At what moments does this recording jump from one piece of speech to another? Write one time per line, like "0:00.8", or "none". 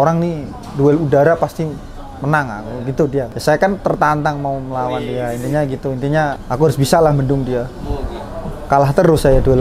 0:03.3
0:06.4